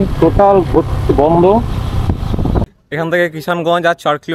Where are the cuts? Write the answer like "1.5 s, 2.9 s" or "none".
2.7 s